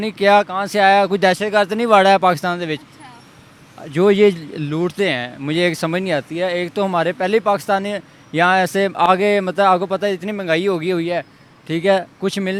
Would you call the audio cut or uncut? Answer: uncut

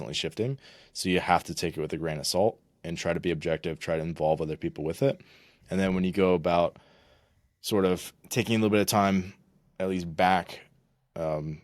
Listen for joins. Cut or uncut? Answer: uncut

